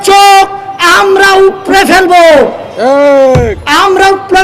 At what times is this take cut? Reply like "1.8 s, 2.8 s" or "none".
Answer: none